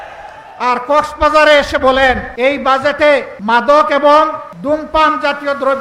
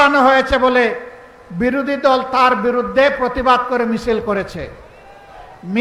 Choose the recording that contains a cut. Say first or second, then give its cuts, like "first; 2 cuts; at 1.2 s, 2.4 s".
first; 3 cuts; at 2.3 s, 3.3 s, 4.5 s